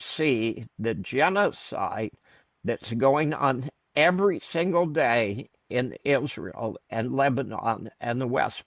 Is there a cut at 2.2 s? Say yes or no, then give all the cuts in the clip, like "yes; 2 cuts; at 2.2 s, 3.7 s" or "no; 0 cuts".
no; 0 cuts